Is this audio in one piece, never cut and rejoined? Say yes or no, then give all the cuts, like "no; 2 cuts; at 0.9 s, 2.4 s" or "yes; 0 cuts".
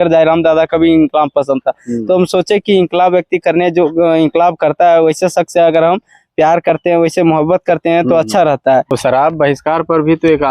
no; 1 cut; at 8.9 s